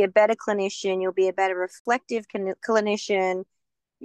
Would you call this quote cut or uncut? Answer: cut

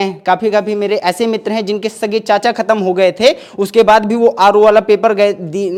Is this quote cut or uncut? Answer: uncut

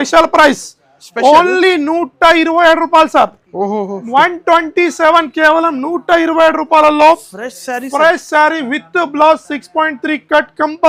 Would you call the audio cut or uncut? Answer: uncut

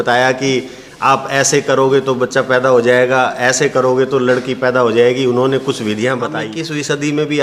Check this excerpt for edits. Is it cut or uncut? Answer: cut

